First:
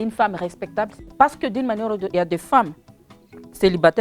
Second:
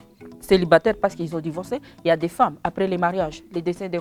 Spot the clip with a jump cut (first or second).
first